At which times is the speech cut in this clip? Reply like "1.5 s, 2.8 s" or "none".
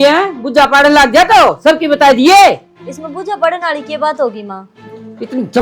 none